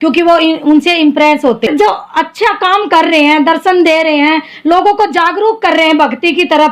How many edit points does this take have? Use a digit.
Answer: 1